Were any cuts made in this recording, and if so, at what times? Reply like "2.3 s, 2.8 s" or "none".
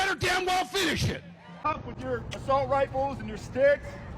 1.5 s